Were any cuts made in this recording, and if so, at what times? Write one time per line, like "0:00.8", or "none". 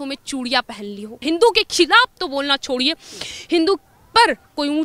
0:01.2

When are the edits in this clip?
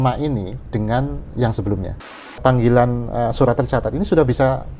0:02.2

